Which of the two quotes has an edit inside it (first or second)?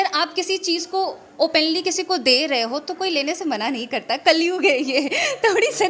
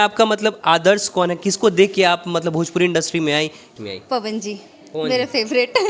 second